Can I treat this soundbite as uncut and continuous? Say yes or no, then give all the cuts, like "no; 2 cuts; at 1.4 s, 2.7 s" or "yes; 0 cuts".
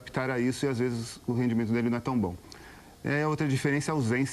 no; 1 cut; at 2.5 s